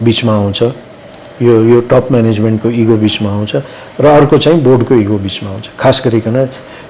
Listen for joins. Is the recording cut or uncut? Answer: uncut